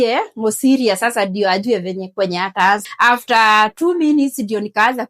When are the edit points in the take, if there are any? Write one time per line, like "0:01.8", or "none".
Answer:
0:02.9